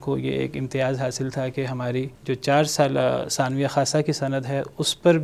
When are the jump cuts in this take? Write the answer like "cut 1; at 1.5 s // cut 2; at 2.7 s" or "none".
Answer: cut 1; at 2.1 s

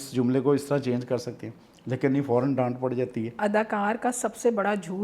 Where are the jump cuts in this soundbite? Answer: cut 1; at 3.4 s

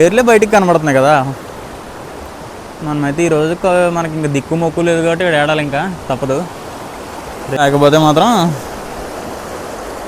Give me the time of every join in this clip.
cut 1; at 7.6 s

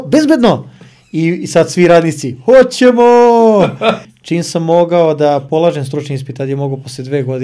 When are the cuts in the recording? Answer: cut 1; at 4.1 s

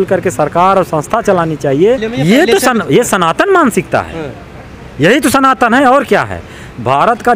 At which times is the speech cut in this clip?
cut 1; at 2.1 s

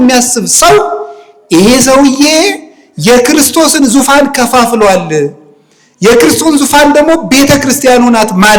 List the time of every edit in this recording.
none

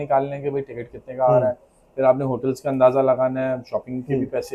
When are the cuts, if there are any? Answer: none

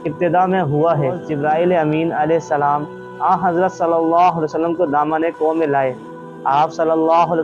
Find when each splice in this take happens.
cut 1; at 1.3 s

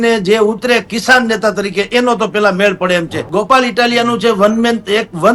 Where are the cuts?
cut 1; at 3.2 s

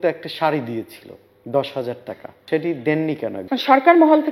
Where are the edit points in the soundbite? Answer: cut 1; at 2.3 s // cut 2; at 3.4 s

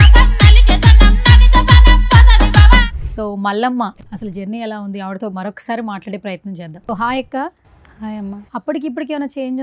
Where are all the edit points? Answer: cut 1; at 4.0 s // cut 2; at 6.9 s // cut 3; at 8.4 s

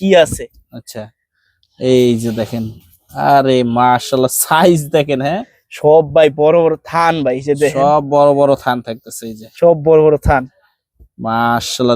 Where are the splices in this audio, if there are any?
none

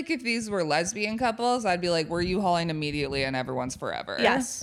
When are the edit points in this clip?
none

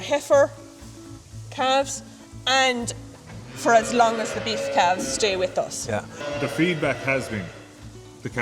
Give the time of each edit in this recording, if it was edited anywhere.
cut 1; at 6.2 s

